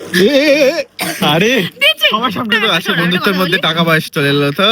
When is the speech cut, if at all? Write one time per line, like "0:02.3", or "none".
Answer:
0:02.5